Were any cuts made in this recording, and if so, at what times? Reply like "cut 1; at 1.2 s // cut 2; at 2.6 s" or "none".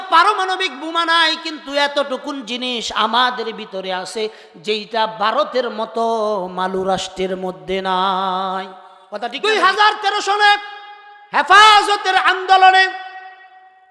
cut 1; at 9.3 s